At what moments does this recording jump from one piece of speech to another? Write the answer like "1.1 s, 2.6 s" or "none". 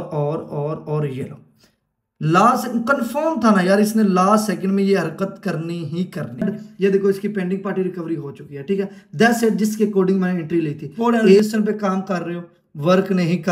6.4 s, 11.4 s